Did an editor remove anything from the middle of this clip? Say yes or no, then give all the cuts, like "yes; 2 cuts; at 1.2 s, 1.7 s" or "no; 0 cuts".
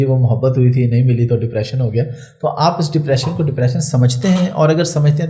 no; 0 cuts